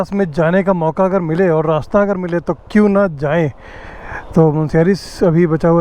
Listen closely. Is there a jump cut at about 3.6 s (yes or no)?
no